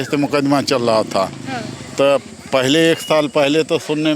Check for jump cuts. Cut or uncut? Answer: uncut